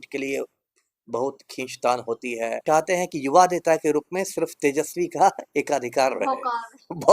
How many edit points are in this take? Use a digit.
1